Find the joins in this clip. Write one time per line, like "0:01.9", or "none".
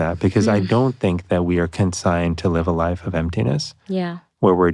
none